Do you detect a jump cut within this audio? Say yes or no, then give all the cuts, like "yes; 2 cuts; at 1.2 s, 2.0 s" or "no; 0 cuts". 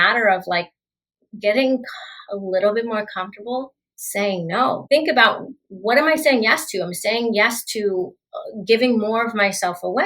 yes; 1 cut; at 4.8 s